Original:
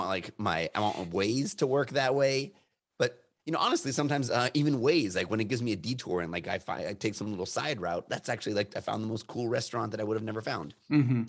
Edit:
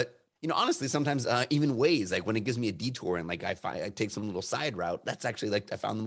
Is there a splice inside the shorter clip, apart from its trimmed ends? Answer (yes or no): no